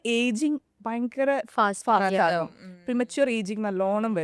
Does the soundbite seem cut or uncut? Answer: uncut